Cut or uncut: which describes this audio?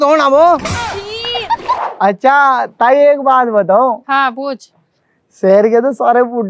cut